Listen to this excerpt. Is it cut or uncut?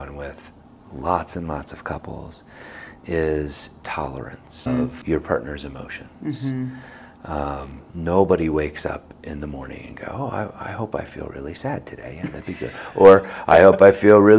uncut